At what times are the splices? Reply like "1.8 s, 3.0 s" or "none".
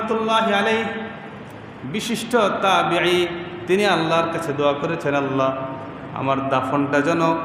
none